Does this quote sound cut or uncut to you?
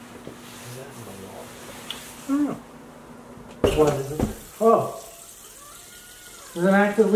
cut